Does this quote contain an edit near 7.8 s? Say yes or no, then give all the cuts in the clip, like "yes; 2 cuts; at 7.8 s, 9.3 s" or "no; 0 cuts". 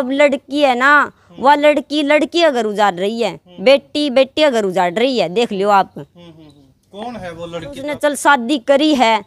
yes; 1 cut; at 7.8 s